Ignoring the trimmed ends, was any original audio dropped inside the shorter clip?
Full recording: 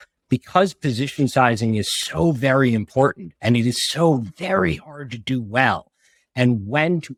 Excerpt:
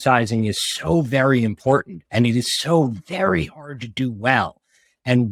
no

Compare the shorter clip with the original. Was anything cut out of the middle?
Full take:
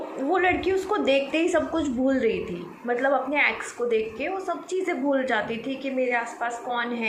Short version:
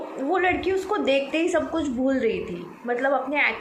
no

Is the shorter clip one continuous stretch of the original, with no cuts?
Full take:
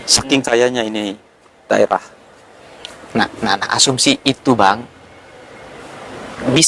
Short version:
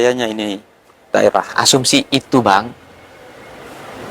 no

